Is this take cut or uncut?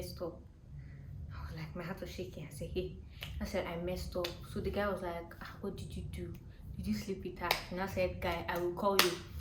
uncut